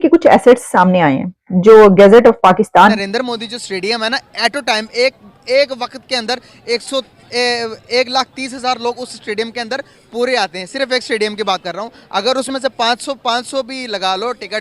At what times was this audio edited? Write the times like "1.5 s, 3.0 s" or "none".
3.0 s